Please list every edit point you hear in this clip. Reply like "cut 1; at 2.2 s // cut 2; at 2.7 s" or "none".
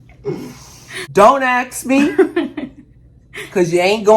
cut 1; at 1.0 s